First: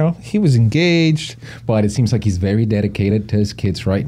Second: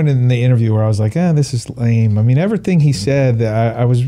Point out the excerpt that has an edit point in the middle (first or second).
first